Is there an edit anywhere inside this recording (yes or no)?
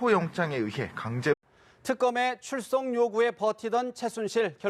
no